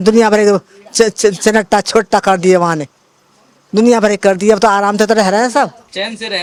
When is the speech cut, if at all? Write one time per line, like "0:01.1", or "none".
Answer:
none